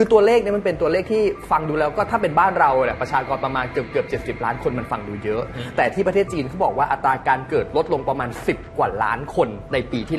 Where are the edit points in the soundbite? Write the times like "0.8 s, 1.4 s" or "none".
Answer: none